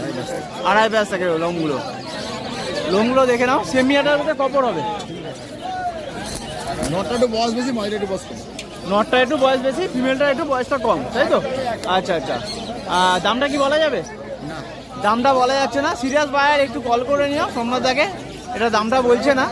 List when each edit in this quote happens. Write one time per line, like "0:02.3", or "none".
none